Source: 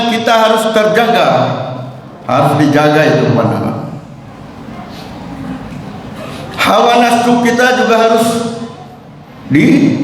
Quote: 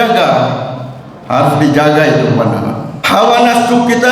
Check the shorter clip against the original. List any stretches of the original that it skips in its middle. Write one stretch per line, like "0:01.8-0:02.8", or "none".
0:03.9-0:06.5